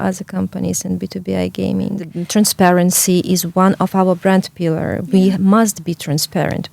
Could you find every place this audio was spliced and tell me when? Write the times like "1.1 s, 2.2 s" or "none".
2.2 s